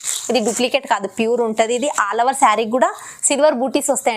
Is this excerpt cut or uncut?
uncut